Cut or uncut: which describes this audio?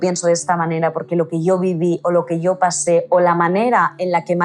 uncut